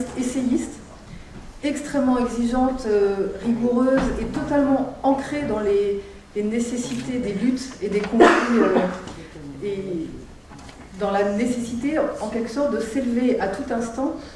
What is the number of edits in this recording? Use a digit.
0